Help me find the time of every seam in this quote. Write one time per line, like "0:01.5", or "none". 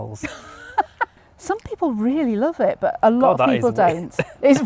0:01.3